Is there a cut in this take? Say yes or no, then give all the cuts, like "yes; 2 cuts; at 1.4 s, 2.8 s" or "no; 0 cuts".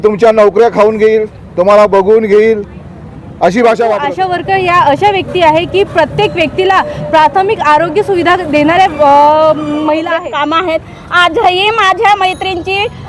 yes; 2 cuts; at 4.1 s, 10.1 s